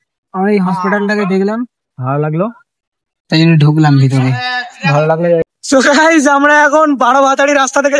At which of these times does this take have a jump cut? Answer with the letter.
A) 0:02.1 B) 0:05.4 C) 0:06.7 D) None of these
B